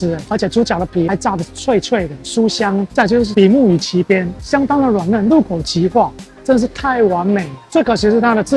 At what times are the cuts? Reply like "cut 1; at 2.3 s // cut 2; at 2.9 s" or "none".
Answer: none